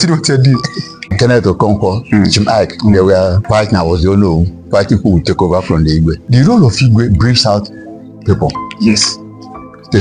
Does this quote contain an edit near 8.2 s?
no; 3 cuts; at 1.1 s, 3.4 s, 6.2 s

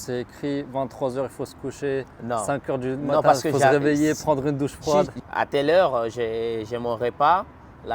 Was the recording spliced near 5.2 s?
yes; 1 cut; at 5.2 s

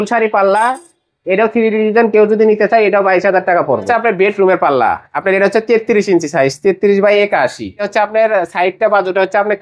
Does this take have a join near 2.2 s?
no; 2 cuts; at 3.9 s, 7.9 s

